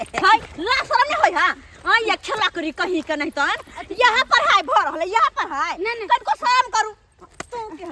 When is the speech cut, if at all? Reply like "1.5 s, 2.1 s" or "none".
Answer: none